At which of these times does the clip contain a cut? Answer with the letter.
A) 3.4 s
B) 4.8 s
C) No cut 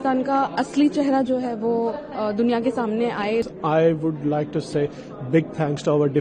A